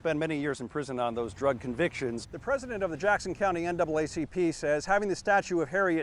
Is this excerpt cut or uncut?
cut